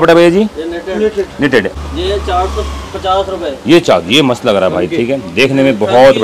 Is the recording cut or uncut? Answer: cut